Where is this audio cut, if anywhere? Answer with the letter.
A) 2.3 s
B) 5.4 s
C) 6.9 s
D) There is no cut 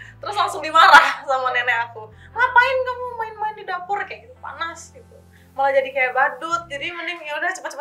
B